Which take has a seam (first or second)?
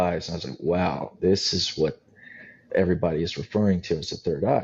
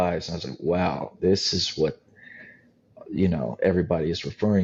first